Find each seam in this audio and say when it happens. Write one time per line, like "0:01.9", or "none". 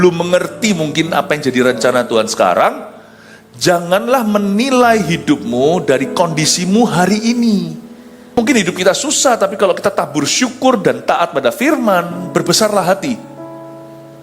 0:08.4